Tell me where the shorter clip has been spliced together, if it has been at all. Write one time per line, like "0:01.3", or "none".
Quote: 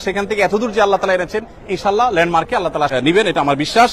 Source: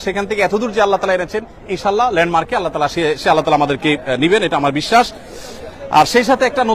0:02.9

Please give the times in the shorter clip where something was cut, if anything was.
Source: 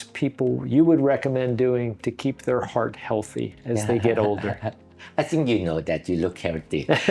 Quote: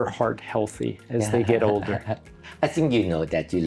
none

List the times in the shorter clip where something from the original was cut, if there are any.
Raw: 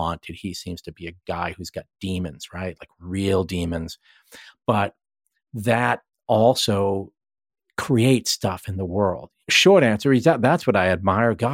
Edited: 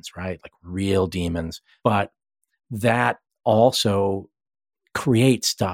0:01.6

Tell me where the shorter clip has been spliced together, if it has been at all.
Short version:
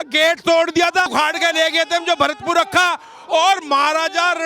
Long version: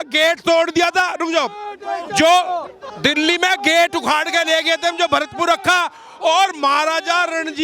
0:01.1

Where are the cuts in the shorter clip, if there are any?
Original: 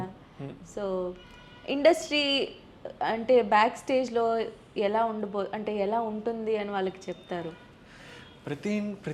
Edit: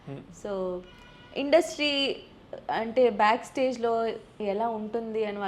0:04.4

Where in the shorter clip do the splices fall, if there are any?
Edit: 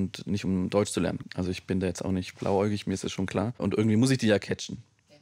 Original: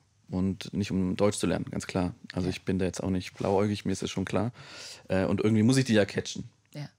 0:01.2
0:03.6

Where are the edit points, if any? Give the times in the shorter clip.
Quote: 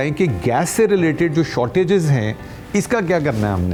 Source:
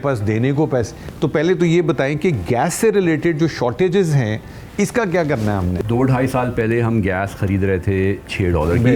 none

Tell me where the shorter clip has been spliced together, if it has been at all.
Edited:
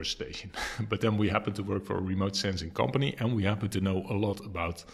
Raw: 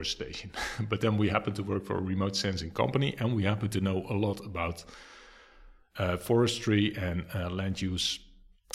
none

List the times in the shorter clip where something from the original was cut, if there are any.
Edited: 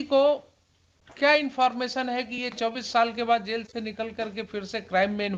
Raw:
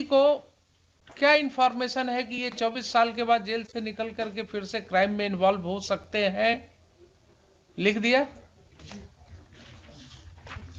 none

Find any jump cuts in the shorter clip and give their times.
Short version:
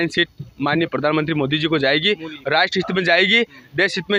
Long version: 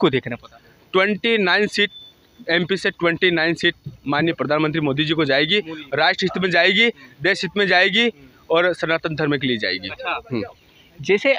none

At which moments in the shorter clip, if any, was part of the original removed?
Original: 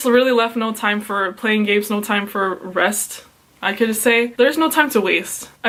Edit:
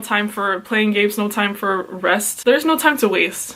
0:02.4

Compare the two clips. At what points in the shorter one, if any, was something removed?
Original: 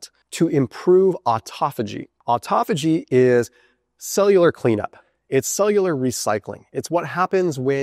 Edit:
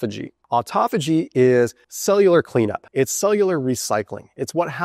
0:01.9
0:02.8

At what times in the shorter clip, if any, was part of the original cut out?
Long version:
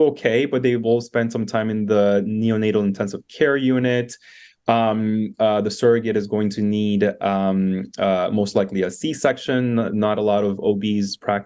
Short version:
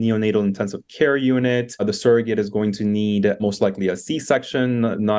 0:01.8
0:03.4

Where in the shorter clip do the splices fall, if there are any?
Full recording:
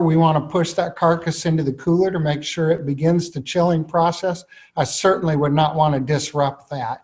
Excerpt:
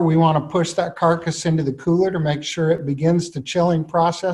none

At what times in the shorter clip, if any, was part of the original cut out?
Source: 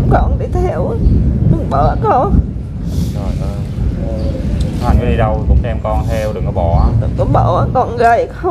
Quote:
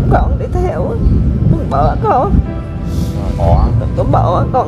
0:03.4

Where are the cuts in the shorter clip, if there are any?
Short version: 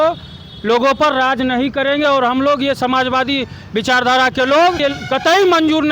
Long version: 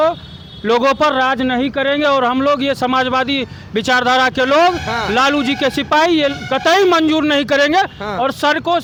0:04.8

